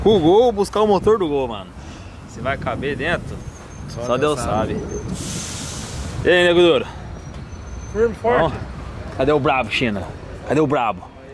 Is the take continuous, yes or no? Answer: yes